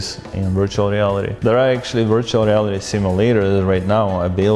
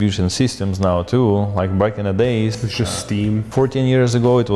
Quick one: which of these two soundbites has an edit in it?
first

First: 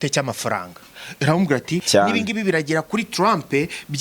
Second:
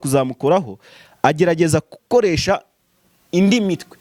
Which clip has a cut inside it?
first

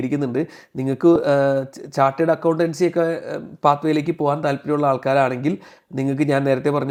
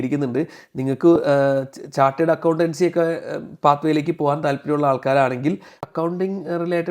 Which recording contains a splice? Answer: second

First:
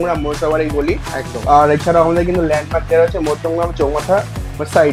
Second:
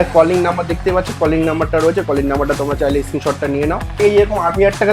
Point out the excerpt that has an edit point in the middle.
second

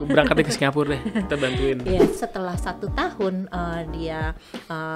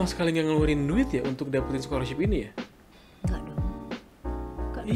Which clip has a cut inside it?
first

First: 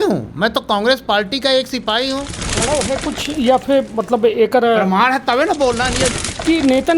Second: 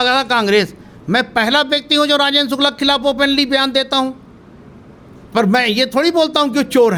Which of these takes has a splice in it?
first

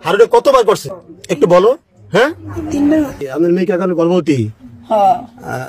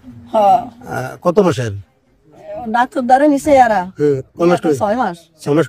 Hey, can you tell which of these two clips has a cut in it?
first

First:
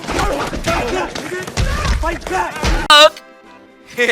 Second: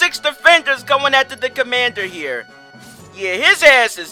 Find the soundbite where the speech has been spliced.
first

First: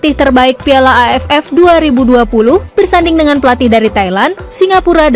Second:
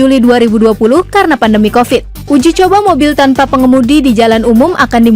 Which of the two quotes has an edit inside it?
second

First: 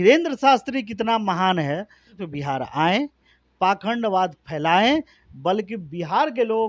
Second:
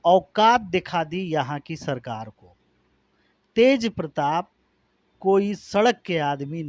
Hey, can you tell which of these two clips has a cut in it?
first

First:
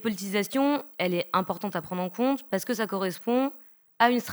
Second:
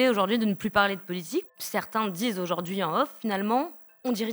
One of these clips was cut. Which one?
second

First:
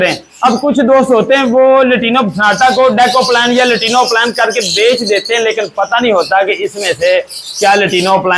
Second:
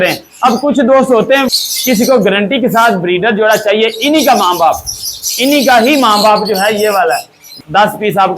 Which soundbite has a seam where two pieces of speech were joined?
second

